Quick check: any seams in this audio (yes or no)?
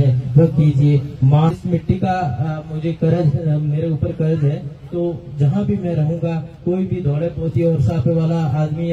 yes